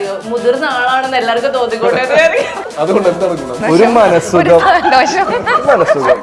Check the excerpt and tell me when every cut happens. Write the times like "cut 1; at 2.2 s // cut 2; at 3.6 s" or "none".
cut 1; at 2.6 s // cut 2; at 3.6 s